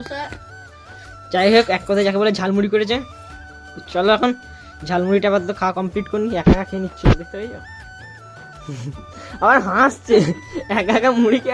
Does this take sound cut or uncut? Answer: uncut